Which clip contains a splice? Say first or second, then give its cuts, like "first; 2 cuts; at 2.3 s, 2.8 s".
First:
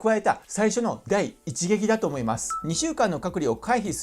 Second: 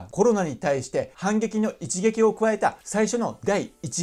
first; 1 cut; at 2.6 s